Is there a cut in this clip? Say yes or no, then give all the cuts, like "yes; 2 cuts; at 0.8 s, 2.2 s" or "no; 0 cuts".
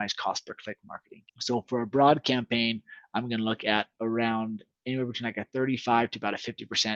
no; 0 cuts